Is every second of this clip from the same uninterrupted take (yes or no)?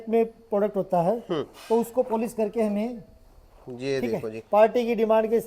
yes